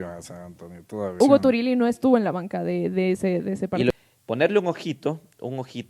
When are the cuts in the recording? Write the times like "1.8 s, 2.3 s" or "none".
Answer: 1.2 s, 3.9 s